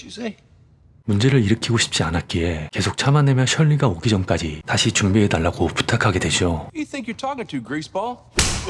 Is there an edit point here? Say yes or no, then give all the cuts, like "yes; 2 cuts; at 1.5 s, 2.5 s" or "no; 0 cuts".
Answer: no; 0 cuts